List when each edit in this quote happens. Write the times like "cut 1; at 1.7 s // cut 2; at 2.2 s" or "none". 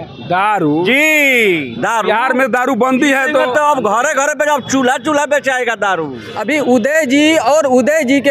cut 1; at 6.3 s